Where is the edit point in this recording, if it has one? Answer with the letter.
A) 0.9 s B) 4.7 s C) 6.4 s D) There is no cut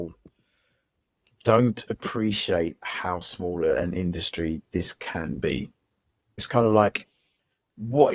C